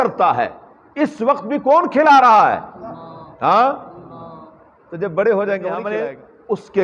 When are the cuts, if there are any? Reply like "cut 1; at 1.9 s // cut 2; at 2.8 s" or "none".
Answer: cut 1; at 5.9 s